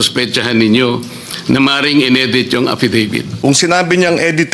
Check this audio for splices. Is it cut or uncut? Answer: cut